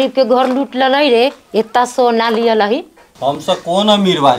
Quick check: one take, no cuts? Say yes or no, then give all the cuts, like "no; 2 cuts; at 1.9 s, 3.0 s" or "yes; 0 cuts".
yes; 0 cuts